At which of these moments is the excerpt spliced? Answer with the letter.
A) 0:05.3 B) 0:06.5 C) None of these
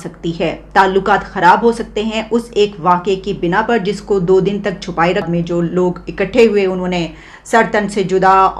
A